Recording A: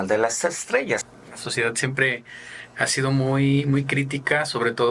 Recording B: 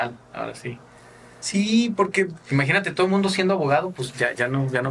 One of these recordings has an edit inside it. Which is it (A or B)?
A